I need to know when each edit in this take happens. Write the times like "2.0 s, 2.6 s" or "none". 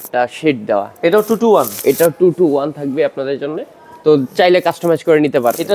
none